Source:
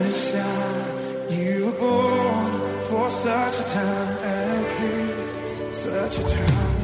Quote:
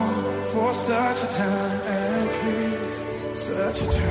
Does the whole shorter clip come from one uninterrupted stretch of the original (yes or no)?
yes